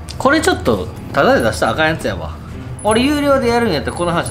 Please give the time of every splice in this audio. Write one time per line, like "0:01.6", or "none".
none